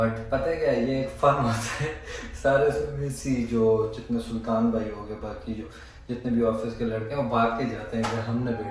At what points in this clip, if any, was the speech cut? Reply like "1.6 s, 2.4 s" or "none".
none